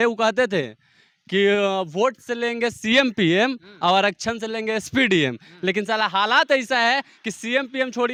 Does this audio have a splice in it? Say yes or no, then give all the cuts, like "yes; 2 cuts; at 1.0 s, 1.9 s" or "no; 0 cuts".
no; 0 cuts